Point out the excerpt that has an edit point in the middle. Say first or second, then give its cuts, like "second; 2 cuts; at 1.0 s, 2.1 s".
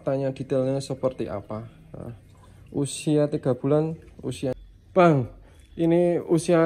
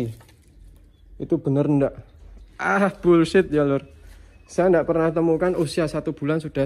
first; 1 cut; at 4.5 s